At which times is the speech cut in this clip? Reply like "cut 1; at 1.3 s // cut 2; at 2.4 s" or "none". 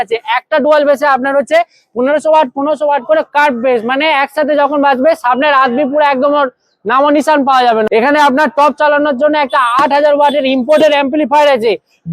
cut 1; at 7.9 s